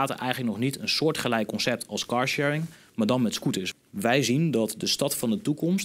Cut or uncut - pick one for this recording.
cut